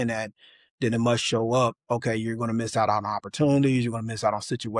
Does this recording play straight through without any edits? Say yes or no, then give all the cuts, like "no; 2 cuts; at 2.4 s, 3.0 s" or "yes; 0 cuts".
yes; 0 cuts